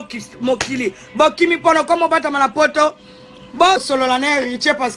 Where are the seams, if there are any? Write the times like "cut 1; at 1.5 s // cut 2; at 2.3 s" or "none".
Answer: cut 1; at 3.8 s